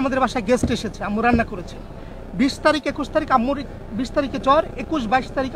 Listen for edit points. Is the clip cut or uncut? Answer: uncut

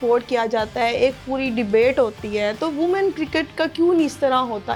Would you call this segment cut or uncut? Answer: uncut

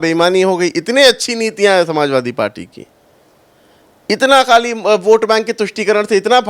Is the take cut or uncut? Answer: uncut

